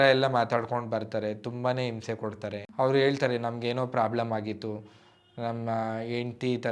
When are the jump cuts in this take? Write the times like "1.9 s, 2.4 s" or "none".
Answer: 2.7 s

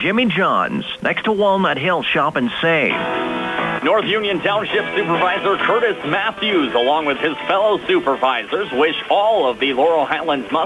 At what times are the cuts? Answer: 2.9 s

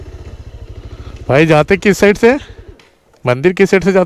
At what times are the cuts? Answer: none

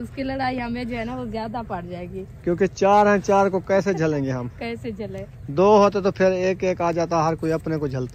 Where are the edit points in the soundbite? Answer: none

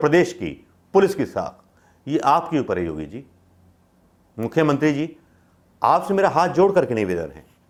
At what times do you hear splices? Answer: none

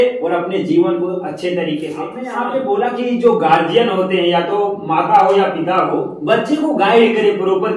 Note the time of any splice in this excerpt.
2.2 s

